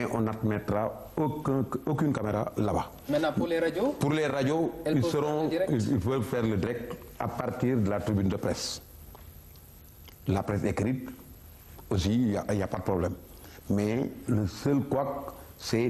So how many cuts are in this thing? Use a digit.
0